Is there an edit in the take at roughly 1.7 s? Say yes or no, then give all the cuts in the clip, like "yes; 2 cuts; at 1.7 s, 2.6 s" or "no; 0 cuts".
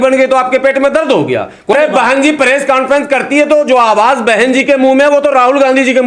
yes; 1 cut; at 1.7 s